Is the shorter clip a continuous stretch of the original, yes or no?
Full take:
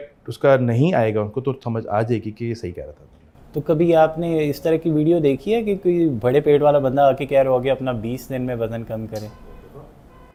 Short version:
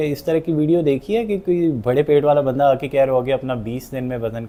yes